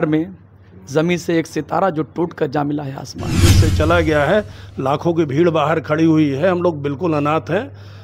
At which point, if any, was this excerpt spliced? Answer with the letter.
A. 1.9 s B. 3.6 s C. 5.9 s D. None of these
B